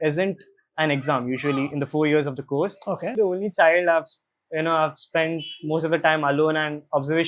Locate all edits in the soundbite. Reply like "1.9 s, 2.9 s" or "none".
3.1 s